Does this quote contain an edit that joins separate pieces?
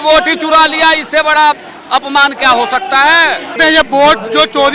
yes; 1 cut; at 3.6 s

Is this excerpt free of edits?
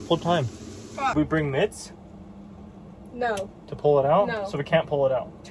no; 1 cut; at 1.1 s

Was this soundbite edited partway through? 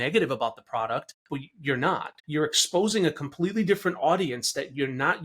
yes; 2 cuts; at 1.2 s, 2.1 s

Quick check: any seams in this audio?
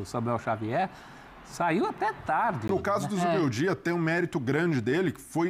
yes; 1 cut; at 2.6 s

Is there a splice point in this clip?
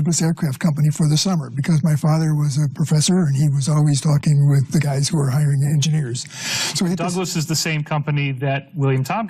no; 0 cuts

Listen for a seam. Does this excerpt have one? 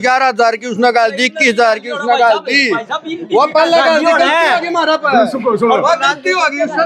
no; 0 cuts

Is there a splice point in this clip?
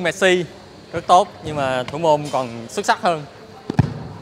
no; 0 cuts

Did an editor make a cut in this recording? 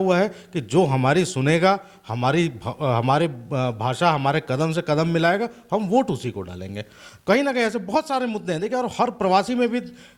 no; 0 cuts

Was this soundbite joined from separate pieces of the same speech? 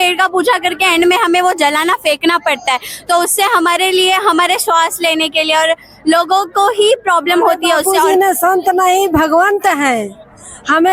yes; 1 cut; at 7.9 s

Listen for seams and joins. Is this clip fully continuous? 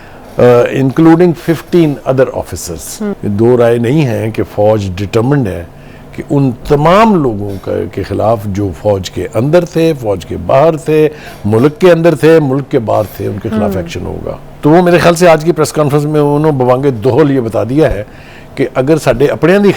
no; 2 cuts; at 3.2 s, 14.4 s

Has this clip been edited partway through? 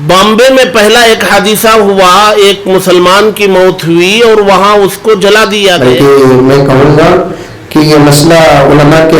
yes; 1 cut; at 5.8 s

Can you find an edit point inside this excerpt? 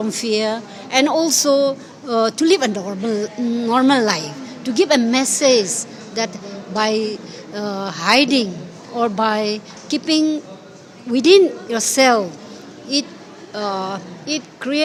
no; 0 cuts

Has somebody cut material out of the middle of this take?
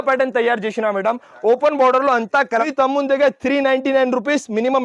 yes; 1 cut; at 2.7 s

